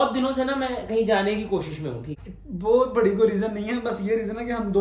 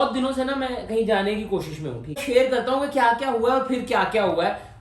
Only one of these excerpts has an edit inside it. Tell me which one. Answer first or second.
first